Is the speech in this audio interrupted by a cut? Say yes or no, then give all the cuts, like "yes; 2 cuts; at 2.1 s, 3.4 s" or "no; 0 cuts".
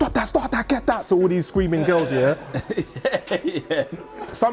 no; 0 cuts